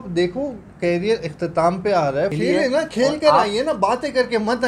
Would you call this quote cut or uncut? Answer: cut